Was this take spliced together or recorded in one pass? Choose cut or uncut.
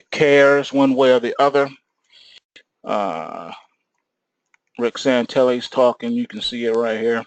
cut